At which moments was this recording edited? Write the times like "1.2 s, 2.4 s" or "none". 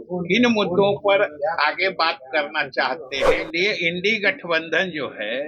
3.2 s